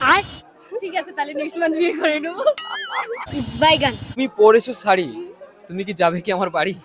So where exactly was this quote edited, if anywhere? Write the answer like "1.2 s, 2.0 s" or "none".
4.1 s